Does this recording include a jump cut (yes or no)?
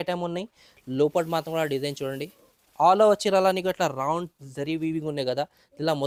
no